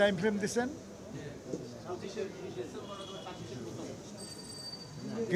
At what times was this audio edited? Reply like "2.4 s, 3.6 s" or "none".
none